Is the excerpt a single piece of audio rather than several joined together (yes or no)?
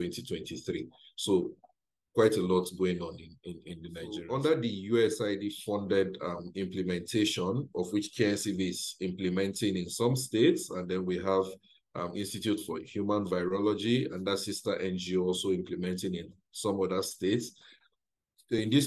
no